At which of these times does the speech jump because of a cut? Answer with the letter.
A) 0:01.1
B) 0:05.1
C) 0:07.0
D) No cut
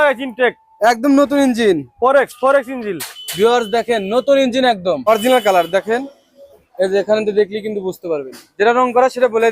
B